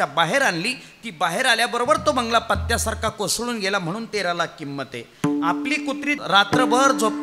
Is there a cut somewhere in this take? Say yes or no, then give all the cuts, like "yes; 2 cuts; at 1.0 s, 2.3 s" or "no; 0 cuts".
yes; 1 cut; at 6.2 s